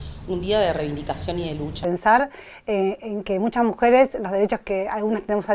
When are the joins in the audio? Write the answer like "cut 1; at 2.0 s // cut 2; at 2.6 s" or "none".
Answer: cut 1; at 1.8 s